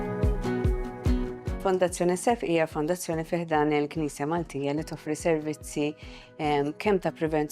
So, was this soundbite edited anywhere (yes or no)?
yes